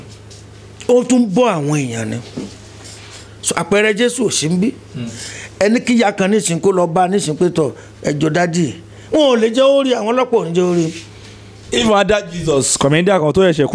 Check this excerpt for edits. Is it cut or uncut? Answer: uncut